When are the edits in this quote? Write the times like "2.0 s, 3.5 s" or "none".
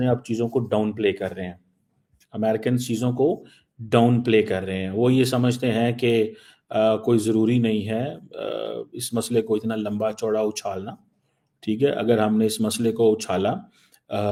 none